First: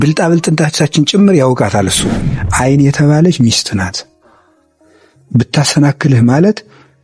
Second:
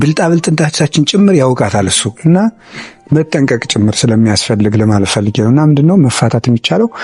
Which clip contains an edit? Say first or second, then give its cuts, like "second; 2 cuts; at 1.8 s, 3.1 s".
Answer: first; 1 cut; at 2.1 s